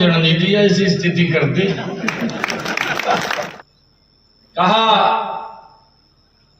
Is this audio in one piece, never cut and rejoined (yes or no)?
no